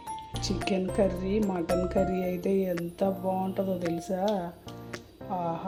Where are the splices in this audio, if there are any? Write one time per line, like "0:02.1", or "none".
none